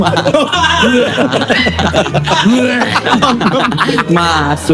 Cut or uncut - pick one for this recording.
uncut